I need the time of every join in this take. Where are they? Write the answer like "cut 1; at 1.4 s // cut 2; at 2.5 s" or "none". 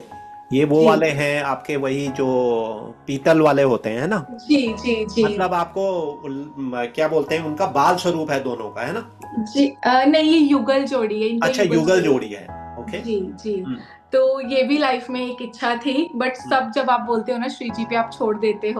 none